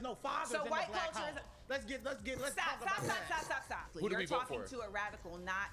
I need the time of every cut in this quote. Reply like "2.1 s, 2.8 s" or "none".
3.9 s